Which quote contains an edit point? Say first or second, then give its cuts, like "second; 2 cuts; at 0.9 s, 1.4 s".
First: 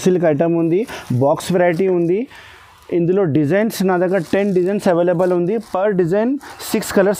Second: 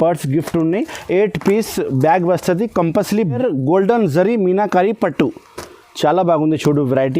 second; 1 cut; at 3.4 s